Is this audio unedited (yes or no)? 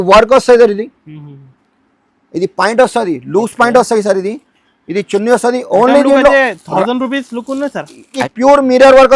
no